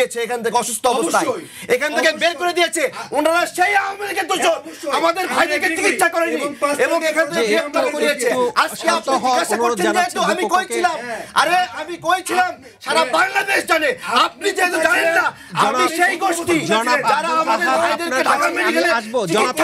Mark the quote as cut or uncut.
uncut